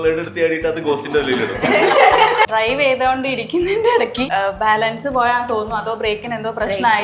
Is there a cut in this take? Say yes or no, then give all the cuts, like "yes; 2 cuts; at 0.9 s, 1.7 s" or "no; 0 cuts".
yes; 2 cuts; at 2.5 s, 4.3 s